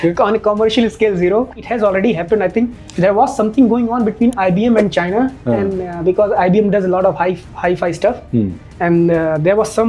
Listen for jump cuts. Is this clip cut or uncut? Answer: cut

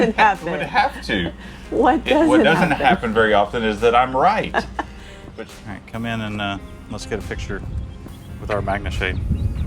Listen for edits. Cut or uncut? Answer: cut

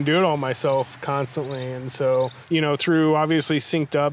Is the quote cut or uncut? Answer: cut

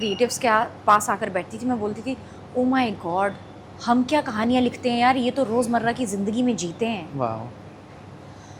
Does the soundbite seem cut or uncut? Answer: uncut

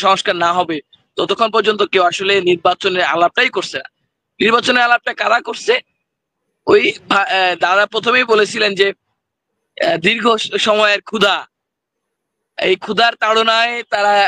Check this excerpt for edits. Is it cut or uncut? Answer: uncut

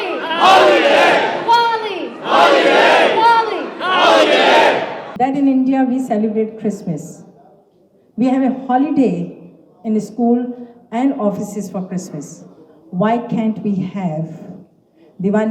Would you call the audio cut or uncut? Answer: cut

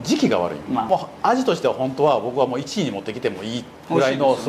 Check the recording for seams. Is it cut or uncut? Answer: cut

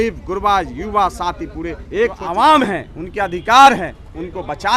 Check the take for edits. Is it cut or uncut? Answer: cut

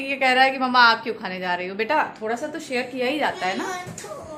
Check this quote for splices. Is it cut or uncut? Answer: uncut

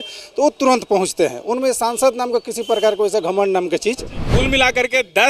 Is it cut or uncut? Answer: cut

